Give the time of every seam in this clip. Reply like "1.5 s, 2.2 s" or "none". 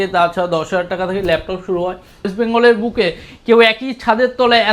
2.3 s